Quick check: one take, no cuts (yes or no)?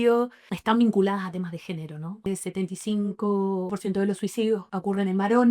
no